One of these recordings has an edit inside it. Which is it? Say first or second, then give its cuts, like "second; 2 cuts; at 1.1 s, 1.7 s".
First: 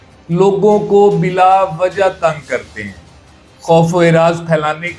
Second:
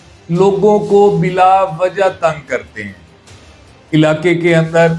first; 1 cut; at 3.5 s